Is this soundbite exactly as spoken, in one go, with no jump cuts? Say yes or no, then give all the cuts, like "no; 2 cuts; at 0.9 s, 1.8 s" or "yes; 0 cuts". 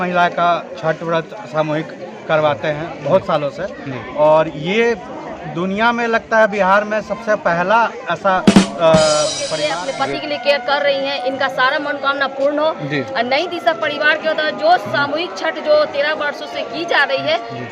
no; 1 cut; at 9.7 s